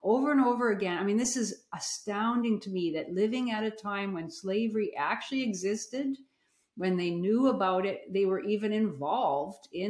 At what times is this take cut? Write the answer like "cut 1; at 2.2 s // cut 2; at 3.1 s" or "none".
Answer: none